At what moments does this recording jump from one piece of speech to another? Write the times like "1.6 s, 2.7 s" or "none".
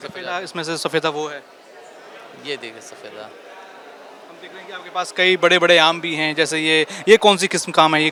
none